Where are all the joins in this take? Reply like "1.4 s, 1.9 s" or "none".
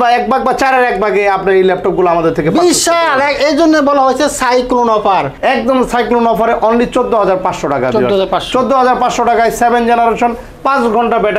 5.3 s